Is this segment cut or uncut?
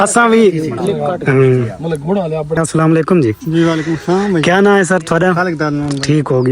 cut